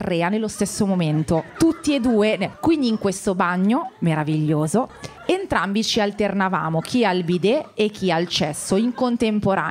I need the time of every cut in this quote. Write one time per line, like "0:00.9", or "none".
none